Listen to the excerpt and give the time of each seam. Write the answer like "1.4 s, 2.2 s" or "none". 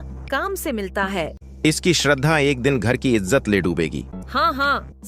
1.4 s, 4.2 s